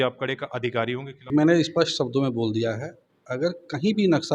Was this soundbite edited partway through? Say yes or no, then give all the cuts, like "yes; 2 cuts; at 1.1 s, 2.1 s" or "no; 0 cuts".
yes; 1 cut; at 1.1 s